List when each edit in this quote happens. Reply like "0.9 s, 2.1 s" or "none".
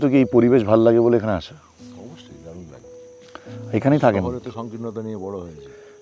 none